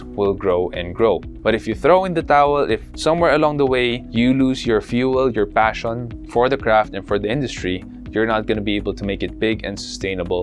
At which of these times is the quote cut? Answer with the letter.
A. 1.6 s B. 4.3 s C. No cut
C